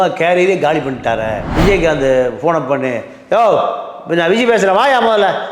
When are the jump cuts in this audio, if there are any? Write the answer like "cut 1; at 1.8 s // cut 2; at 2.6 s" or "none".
cut 1; at 1.4 s